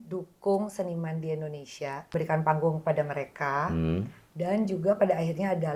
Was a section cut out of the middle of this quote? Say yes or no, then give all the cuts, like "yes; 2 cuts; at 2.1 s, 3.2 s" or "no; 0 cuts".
yes; 1 cut; at 2.0 s